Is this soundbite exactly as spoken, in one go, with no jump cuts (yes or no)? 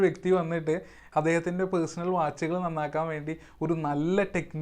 no